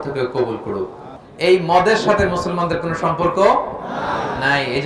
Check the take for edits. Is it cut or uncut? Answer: cut